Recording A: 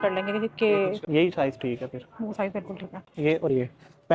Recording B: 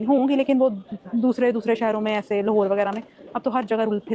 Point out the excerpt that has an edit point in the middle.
A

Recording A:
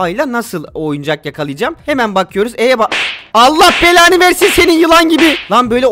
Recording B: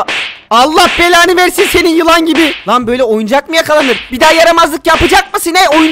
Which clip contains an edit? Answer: B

